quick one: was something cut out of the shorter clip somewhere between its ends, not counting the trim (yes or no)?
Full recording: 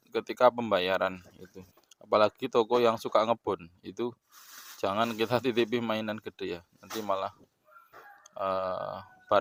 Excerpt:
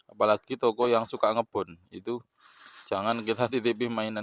no